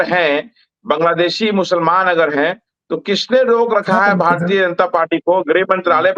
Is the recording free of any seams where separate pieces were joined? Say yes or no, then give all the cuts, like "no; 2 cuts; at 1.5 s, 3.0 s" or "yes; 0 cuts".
yes; 0 cuts